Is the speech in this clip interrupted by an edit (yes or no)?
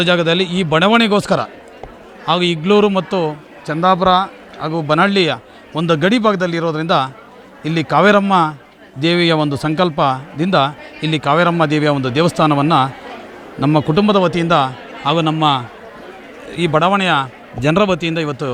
no